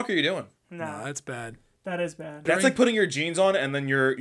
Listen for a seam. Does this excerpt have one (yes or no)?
yes